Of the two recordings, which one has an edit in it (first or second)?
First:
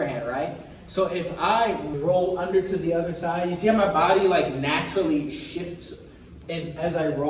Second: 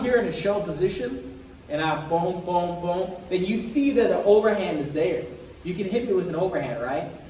first